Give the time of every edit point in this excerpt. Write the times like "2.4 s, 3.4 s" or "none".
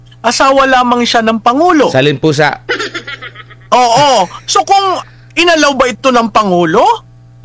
none